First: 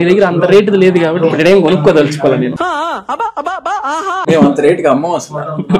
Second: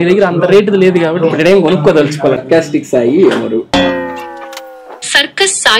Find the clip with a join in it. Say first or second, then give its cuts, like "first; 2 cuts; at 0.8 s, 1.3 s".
second; 1 cut; at 2.4 s